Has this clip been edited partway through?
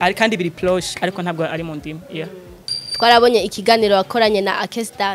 no; 0 cuts

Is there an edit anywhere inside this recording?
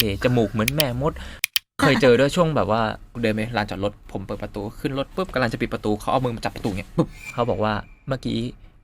yes; 3 cuts; at 1.8 s, 3.1 s, 7.2 s

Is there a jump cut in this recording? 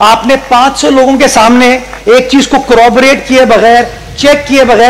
no; 0 cuts

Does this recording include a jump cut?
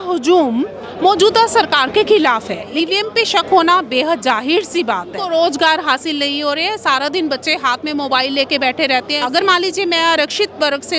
yes; 3 cuts; at 2.7 s, 5.2 s, 9.2 s

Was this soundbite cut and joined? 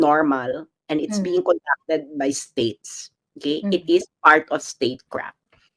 no; 0 cuts

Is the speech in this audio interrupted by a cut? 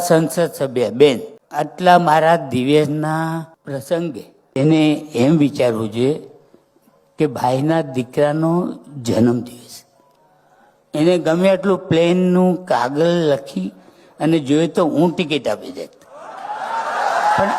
yes; 2 cuts; at 1.4 s, 3.6 s

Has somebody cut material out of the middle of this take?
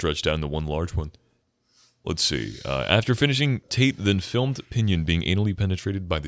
no; 0 cuts

